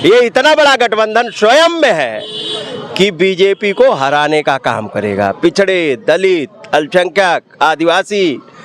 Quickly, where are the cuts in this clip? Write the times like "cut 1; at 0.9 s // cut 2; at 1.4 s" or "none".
none